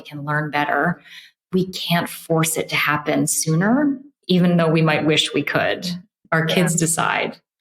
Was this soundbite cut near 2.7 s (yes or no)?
no